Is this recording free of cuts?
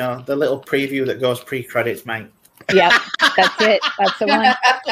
yes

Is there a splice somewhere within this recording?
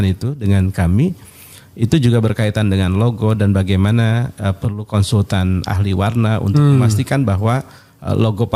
no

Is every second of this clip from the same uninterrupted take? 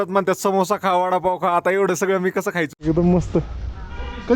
no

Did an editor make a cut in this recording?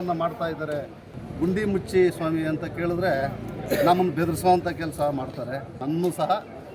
yes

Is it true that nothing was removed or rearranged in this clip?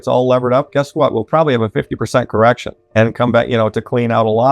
no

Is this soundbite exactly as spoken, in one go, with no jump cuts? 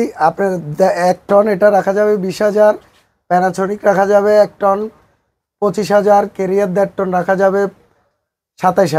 yes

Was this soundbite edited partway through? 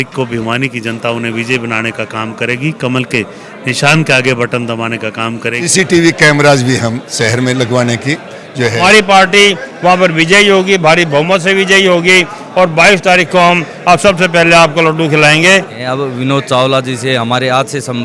yes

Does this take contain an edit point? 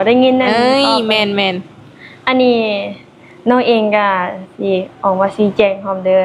no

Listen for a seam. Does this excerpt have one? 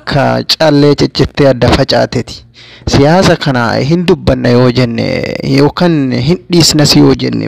no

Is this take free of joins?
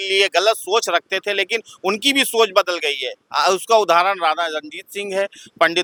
yes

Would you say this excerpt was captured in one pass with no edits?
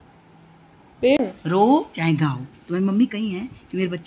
no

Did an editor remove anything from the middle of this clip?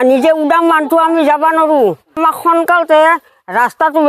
yes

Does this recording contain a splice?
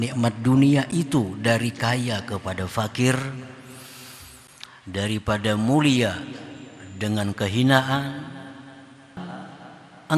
yes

